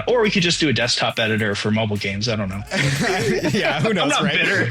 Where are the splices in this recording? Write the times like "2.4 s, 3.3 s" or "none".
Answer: none